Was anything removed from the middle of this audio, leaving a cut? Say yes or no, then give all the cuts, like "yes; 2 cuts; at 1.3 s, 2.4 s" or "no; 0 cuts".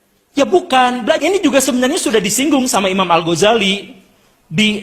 yes; 1 cut; at 1.2 s